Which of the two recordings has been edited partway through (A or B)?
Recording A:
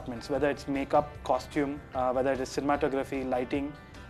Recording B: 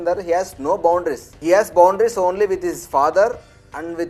A